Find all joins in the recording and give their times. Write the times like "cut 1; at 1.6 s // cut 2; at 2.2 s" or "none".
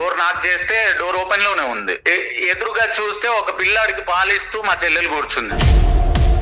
cut 1; at 5.5 s